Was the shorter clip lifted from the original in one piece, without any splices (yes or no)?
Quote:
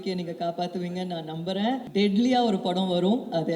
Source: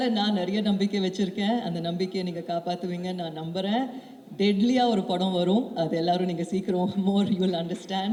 no